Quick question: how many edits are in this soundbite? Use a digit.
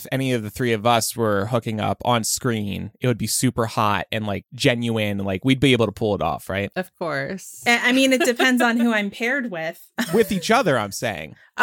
2